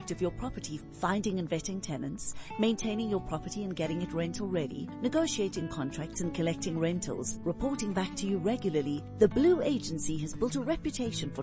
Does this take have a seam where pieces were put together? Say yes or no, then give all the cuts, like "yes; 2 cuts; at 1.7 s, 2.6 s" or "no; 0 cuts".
no; 0 cuts